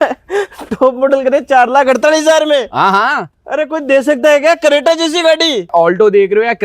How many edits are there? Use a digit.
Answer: 1